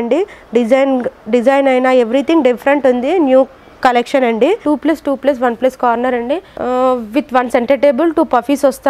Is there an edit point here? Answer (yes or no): yes